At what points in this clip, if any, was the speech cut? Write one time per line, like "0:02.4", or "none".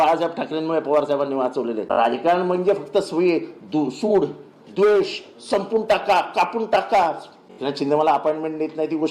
0:01.8
0:07.5